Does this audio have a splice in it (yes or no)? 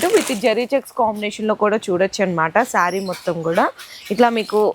no